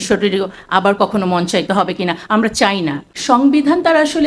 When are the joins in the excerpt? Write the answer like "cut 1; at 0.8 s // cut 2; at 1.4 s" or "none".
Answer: cut 1; at 3.4 s